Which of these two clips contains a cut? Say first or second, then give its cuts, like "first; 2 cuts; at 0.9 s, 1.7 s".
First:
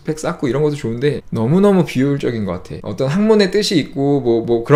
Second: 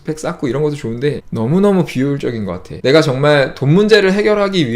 second; 1 cut; at 2.7 s